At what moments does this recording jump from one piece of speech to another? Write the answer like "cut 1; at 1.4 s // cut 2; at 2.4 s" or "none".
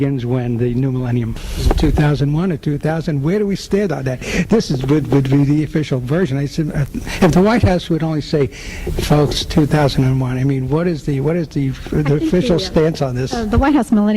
cut 1; at 6.3 s